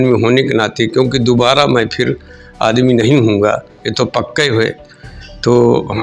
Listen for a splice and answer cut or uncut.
uncut